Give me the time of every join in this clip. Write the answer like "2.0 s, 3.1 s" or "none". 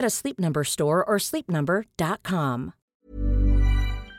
2.9 s